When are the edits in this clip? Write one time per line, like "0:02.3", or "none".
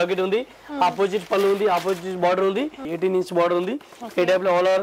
0:02.8